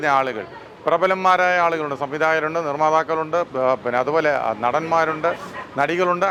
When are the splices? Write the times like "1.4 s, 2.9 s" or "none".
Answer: none